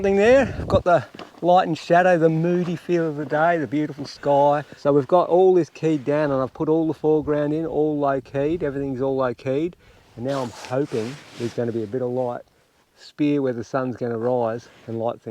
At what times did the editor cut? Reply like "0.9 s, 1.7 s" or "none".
4.7 s